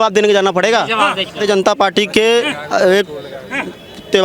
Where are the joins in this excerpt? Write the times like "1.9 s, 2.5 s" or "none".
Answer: none